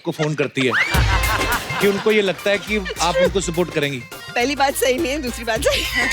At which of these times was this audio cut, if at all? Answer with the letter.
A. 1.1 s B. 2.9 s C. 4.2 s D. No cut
C